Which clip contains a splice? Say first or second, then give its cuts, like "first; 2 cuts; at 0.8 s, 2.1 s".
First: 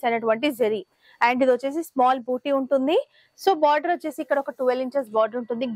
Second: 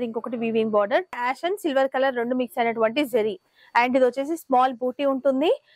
second; 1 cut; at 1.2 s